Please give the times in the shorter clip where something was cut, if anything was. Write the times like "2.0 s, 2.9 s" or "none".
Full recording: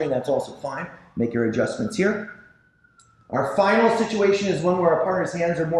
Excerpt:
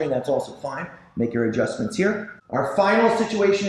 2.3 s